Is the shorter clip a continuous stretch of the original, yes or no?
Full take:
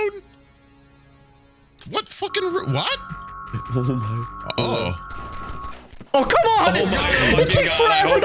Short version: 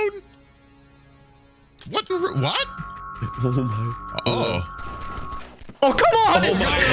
no